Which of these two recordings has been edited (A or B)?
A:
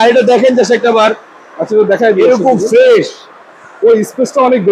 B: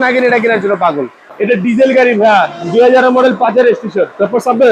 B